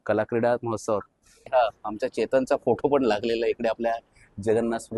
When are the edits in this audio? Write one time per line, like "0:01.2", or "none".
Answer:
0:01.5